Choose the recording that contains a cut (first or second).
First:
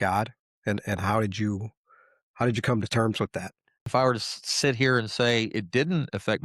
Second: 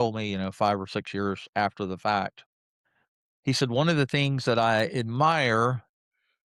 first